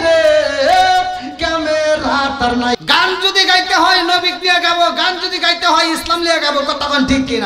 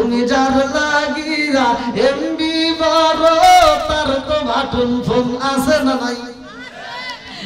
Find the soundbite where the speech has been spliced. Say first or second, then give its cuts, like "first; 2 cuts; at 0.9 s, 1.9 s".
first; 1 cut; at 2.8 s